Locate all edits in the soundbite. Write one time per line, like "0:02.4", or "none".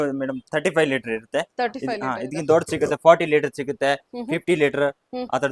none